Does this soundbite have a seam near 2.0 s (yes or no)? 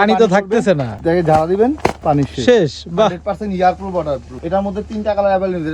yes